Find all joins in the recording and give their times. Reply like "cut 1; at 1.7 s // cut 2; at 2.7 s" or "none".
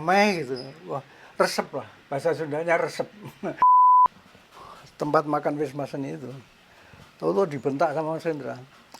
cut 1; at 3.5 s // cut 2; at 4.3 s